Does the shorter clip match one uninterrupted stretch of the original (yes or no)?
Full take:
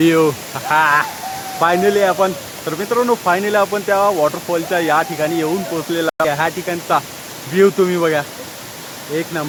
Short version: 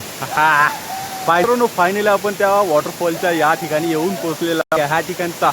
no